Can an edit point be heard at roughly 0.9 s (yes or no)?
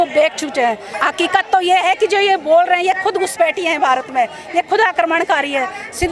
yes